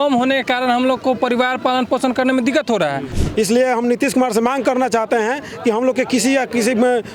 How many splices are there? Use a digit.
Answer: 1